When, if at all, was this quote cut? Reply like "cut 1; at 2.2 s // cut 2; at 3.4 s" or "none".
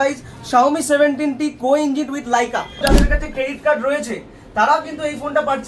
cut 1; at 2.8 s